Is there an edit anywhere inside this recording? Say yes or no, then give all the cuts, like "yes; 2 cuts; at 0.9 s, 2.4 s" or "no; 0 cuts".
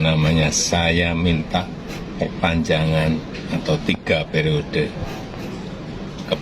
no; 0 cuts